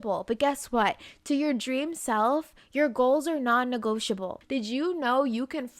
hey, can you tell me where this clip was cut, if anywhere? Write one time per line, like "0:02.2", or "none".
0:04.3